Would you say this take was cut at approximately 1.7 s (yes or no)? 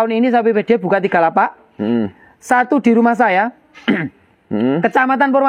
no